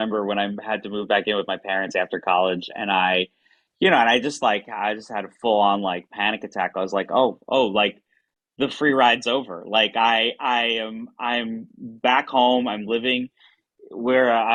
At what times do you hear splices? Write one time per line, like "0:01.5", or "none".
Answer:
none